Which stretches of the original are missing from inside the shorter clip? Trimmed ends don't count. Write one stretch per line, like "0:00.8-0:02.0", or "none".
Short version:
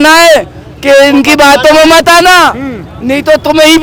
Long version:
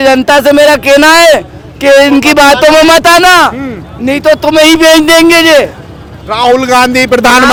none